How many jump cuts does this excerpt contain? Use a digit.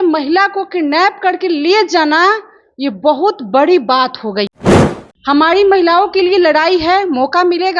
1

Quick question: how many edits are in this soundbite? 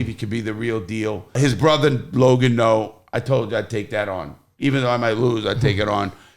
1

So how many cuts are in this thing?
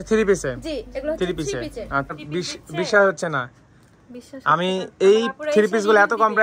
1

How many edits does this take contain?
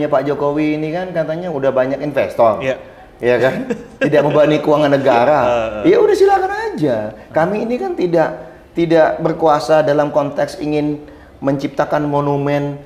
0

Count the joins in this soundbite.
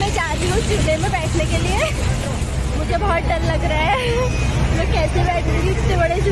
0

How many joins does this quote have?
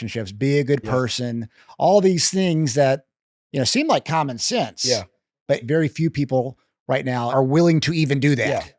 2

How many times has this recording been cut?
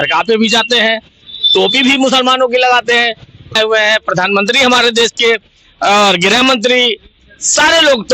1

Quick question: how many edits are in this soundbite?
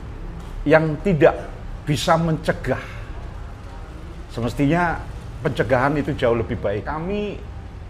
1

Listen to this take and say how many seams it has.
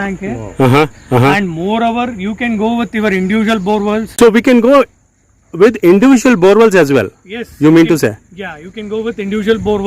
2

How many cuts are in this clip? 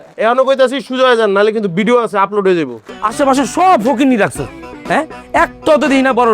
1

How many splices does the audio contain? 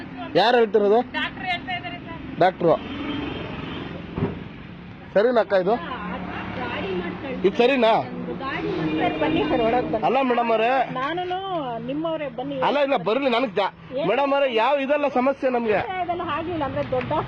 0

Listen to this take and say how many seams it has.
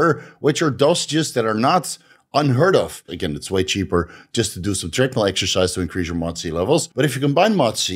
2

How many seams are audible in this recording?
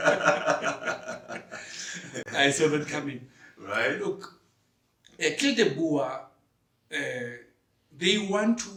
0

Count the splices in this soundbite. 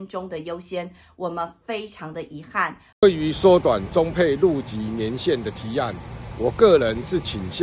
1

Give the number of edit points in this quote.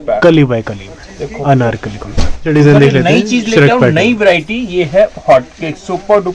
1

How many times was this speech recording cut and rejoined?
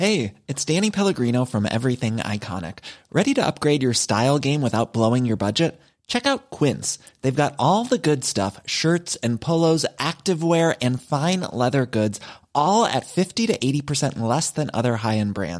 0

